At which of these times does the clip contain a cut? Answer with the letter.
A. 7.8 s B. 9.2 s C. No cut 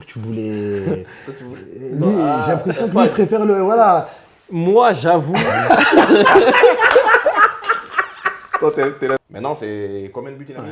B